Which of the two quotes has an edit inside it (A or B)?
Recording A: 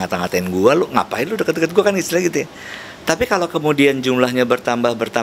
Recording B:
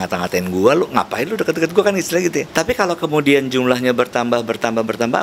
B